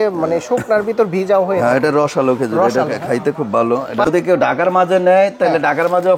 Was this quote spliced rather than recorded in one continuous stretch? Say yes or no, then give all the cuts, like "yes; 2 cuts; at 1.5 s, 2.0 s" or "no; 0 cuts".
yes; 1 cut; at 4.1 s